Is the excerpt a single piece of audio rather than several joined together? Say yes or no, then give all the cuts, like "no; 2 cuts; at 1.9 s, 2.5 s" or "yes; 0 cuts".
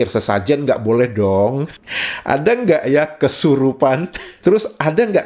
no; 1 cut; at 1.7 s